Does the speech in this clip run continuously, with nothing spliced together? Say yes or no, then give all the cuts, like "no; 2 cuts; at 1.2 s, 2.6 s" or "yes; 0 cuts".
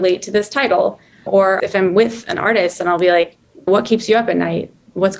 no; 2 cuts; at 1.4 s, 3.6 s